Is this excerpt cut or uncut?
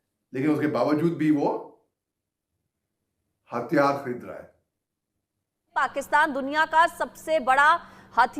cut